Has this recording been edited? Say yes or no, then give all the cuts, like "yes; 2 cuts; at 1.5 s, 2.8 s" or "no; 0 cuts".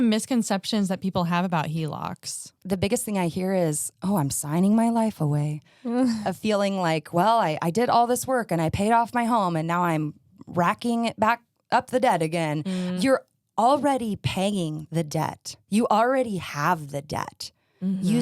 yes; 4 cuts; at 2.6 s, 6.2 s, 12.9 s, 15.6 s